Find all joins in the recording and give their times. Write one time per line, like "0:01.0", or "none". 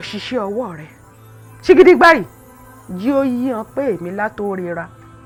none